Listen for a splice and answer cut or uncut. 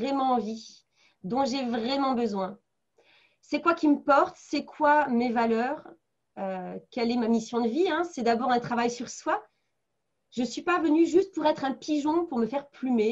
uncut